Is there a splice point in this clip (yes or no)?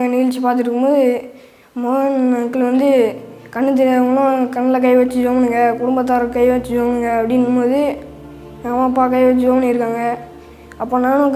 no